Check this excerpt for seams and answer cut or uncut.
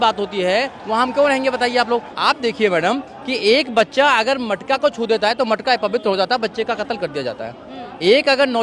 cut